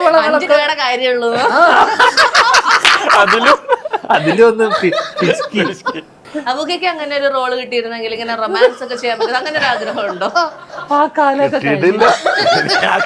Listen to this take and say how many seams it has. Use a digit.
0